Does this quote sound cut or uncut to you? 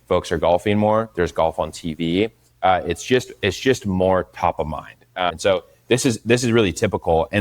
cut